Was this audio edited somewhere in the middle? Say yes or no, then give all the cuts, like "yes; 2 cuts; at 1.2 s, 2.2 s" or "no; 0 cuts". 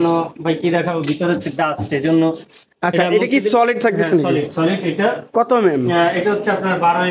no; 0 cuts